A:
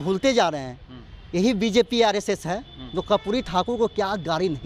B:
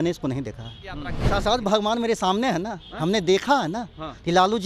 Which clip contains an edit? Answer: B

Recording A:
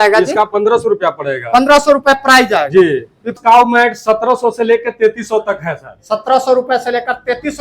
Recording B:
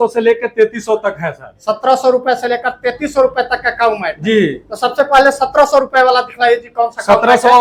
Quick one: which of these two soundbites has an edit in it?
A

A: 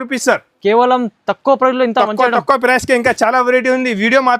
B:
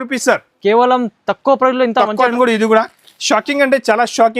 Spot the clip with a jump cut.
B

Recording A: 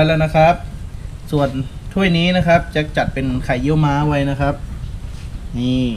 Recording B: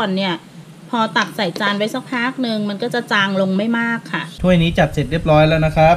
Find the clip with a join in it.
B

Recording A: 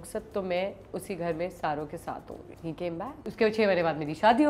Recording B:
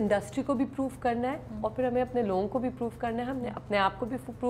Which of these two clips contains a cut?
A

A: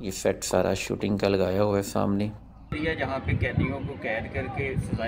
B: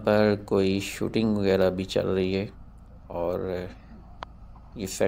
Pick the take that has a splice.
A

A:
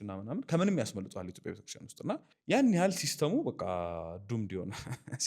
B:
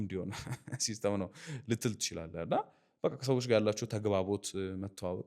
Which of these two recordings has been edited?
A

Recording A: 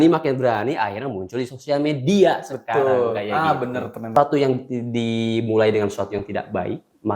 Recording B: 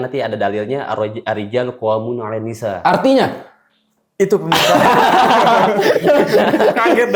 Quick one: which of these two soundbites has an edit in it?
A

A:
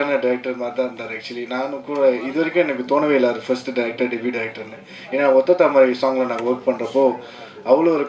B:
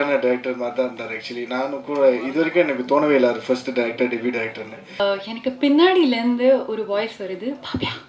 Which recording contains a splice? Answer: B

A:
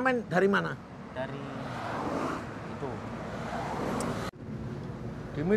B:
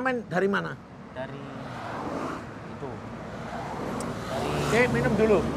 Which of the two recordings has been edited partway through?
A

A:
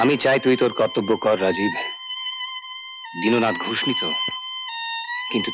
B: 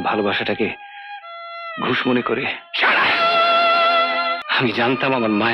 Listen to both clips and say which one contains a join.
B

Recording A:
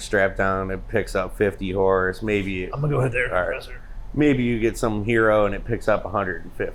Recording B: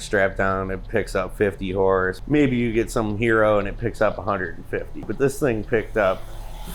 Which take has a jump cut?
B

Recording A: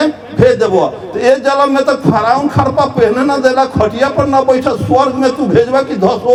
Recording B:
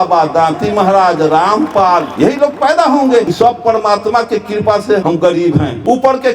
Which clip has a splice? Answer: B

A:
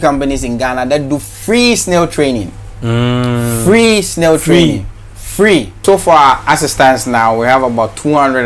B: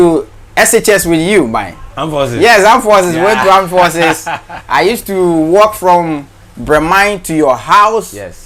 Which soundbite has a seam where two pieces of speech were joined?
A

